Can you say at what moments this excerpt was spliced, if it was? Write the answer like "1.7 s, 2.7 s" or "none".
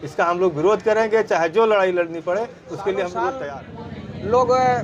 3.4 s